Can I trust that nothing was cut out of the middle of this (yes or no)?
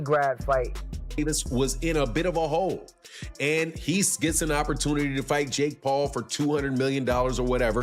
no